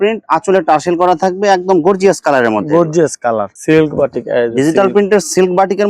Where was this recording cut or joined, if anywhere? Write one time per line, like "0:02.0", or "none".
0:03.5